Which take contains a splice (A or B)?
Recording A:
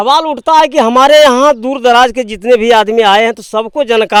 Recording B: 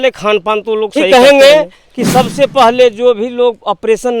B